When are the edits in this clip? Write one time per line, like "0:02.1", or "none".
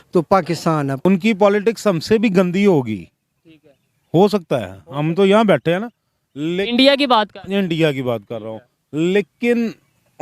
0:01.0